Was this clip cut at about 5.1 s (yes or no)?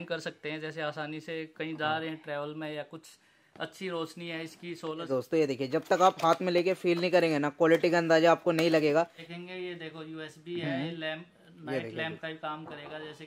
yes